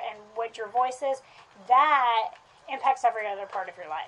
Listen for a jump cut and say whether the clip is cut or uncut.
uncut